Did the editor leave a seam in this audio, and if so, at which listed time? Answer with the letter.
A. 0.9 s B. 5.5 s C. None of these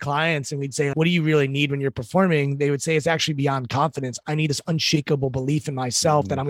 A